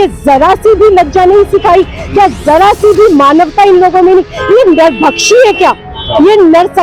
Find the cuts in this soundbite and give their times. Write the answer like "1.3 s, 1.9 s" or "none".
none